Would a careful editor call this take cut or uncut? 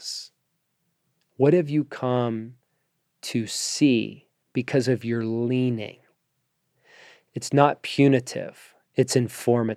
uncut